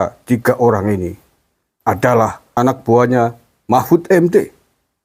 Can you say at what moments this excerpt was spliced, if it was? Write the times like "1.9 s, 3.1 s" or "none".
2.5 s